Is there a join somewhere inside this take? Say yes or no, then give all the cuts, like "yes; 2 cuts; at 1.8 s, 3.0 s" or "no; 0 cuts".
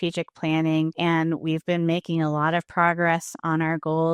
yes; 1 cut; at 0.9 s